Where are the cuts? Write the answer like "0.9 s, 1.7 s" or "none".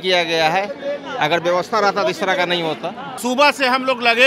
3.1 s